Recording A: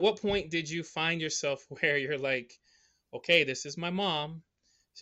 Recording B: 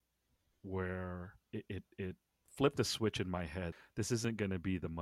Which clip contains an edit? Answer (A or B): B